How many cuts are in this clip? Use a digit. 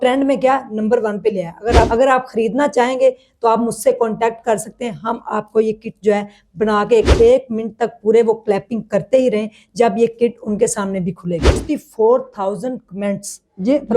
3